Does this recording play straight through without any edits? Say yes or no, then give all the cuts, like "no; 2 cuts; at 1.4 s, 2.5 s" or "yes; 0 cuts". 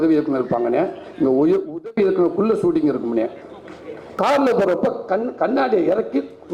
no; 1 cut; at 4.0 s